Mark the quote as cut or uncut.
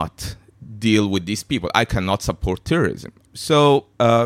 cut